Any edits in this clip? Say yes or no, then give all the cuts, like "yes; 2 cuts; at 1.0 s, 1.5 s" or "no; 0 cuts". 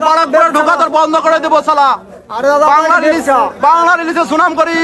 no; 0 cuts